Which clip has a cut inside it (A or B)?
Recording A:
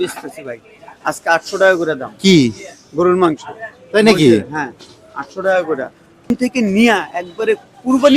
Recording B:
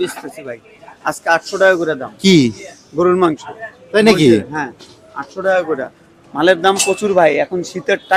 A